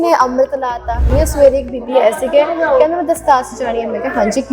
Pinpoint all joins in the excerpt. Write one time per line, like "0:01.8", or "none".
0:01.1